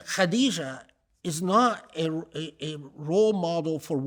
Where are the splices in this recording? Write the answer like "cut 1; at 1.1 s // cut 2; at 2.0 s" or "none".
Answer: none